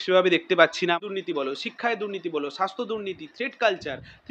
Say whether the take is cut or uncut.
cut